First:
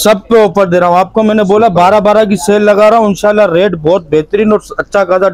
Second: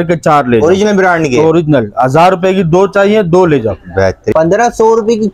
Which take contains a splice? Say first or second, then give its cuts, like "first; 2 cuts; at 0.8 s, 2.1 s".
second; 1 cut; at 4.2 s